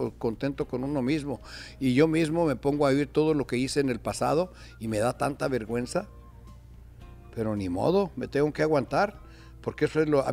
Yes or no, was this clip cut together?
no